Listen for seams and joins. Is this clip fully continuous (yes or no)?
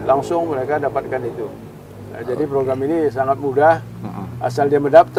yes